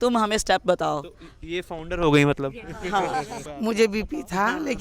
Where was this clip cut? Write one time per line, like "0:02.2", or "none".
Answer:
0:03.4